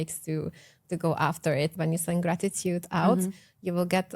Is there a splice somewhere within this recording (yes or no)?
yes